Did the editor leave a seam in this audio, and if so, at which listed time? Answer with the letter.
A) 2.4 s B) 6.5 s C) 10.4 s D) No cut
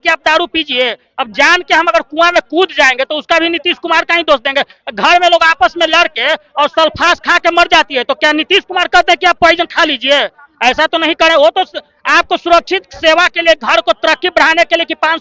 D